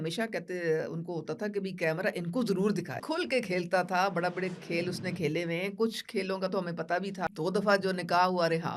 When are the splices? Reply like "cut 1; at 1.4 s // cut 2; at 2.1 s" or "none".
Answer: cut 1; at 3.0 s // cut 2; at 7.2 s